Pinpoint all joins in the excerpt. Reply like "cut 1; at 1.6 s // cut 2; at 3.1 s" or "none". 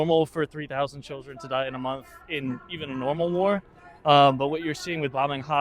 none